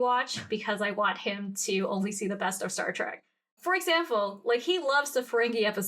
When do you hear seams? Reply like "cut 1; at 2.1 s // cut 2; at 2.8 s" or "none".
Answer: cut 1; at 3.5 s